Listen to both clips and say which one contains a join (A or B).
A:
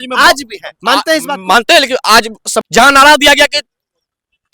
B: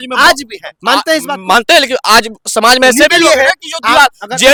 A